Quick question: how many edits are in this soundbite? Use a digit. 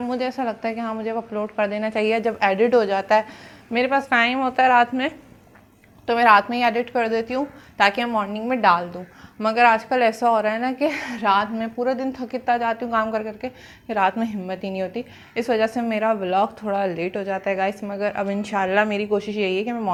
0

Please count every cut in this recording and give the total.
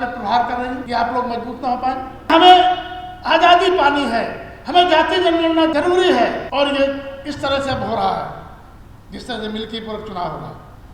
4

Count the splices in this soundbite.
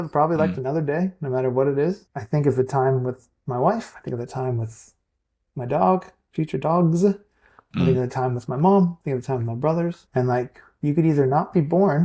2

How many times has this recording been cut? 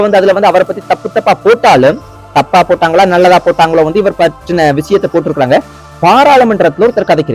0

